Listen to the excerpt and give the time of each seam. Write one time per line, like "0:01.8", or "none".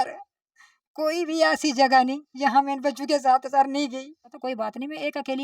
0:04.4